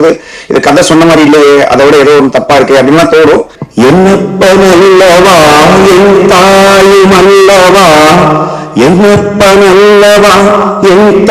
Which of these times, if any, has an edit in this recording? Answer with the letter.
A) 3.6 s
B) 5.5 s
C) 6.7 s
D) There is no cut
A